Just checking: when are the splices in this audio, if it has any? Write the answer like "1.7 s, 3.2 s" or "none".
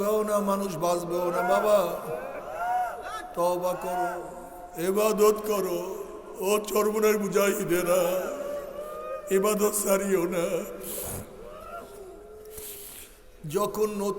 none